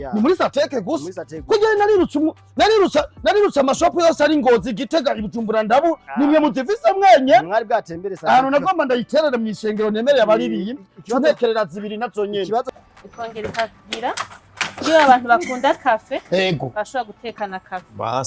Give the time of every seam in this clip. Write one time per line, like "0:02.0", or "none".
0:12.7